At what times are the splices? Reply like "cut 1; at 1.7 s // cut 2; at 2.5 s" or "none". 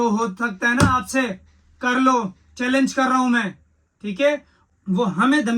cut 1; at 4.6 s